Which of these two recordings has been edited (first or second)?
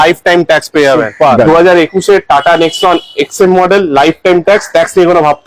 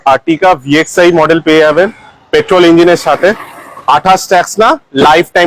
first